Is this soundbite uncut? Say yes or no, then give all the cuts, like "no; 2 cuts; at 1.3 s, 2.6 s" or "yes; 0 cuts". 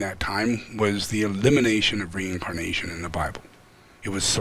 yes; 0 cuts